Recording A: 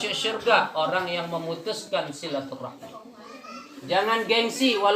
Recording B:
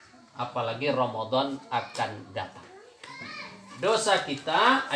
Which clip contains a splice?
B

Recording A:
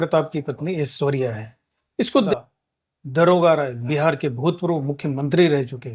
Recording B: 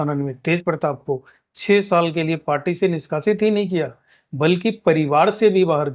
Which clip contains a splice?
A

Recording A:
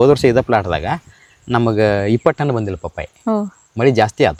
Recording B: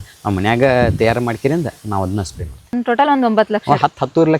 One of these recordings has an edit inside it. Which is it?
B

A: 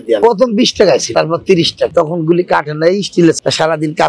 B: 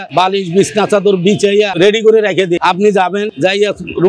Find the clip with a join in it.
A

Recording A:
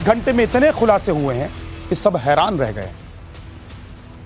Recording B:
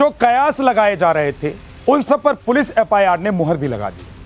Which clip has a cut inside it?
A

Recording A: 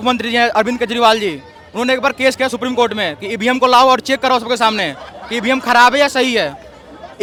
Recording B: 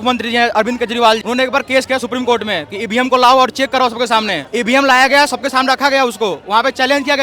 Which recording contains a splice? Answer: B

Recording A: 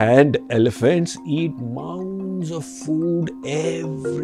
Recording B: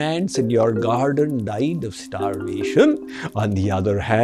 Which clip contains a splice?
B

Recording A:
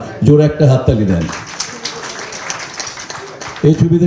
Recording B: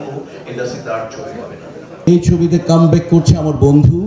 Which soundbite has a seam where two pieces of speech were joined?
B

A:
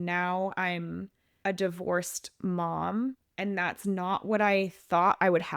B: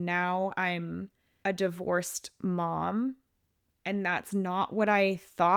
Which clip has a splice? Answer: A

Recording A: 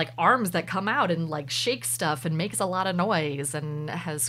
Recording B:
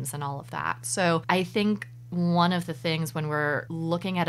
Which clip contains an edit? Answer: B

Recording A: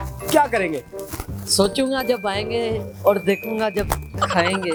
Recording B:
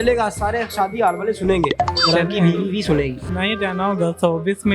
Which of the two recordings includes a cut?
B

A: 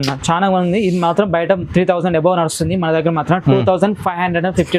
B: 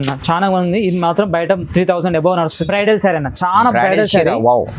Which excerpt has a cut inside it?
B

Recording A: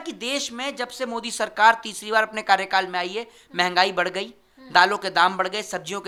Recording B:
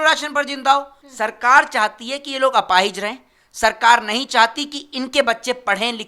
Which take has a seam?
B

